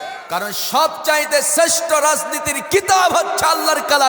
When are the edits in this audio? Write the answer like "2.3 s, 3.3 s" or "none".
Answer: none